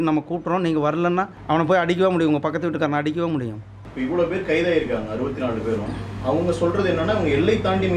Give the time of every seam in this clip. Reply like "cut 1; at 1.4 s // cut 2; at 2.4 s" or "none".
cut 1; at 1.4 s // cut 2; at 3.8 s